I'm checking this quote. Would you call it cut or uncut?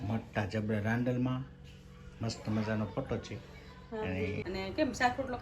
cut